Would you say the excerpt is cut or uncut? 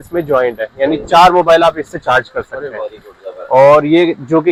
uncut